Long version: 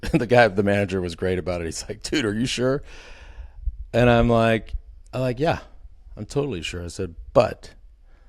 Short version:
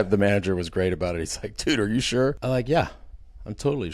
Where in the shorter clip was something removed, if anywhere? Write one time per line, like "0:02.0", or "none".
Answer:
0:02.4